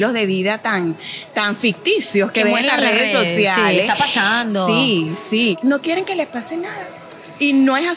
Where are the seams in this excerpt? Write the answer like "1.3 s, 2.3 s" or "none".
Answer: 5.6 s